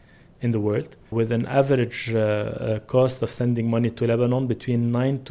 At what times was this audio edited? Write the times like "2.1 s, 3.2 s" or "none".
1.1 s